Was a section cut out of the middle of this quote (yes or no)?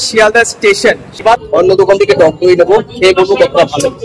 yes